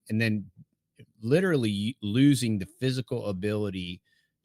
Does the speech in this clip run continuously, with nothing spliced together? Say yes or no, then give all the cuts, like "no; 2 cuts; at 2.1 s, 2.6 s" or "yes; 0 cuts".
yes; 0 cuts